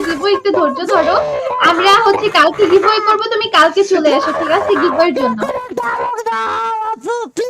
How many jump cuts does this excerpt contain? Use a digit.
0